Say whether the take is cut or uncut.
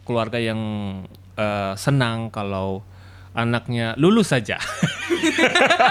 uncut